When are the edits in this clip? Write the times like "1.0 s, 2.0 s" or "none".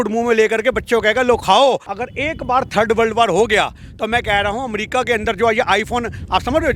1.9 s